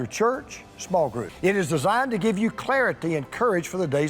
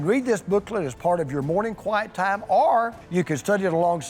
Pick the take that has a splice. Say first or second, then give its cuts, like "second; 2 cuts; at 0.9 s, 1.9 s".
first; 1 cut; at 1.2 s